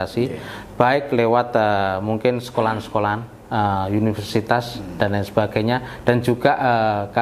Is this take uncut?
yes; 0 cuts

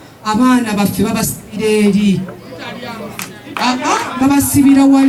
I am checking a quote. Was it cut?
no; 0 cuts

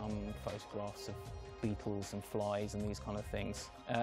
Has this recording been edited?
no; 0 cuts

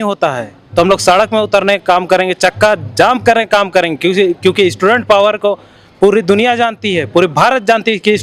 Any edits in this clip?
no; 0 cuts

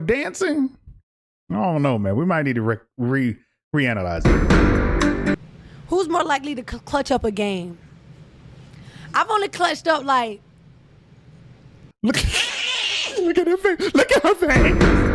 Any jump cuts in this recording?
yes; 2 cuts; at 5.4 s, 11.8 s

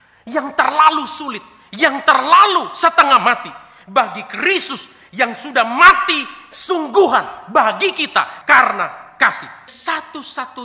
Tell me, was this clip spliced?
yes; 1 cut; at 9.7 s

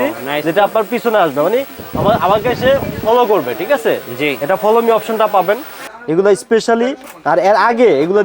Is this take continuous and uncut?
no; 1 cut; at 5.9 s

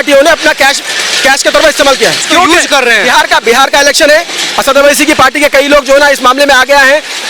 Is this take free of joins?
no; 1 cut; at 2.2 s

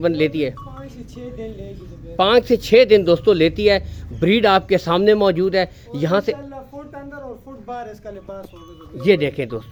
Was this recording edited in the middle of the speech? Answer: no; 0 cuts

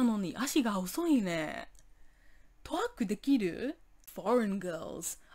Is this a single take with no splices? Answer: no; 1 cut; at 3.9 s

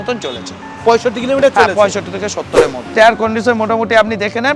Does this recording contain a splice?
yes; 1 cut; at 2.8 s

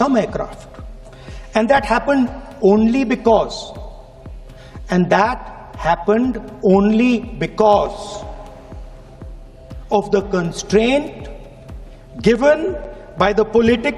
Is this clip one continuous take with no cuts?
yes; 0 cuts

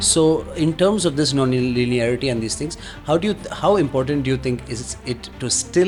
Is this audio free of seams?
yes; 0 cuts

